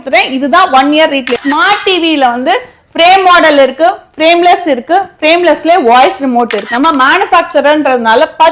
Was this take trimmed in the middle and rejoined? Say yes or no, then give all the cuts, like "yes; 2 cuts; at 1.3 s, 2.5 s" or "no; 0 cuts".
yes; 2 cuts; at 1.4 s, 6.6 s